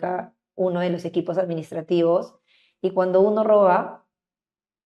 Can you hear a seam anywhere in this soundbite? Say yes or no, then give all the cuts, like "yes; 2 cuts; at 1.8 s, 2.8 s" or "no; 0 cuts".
no; 0 cuts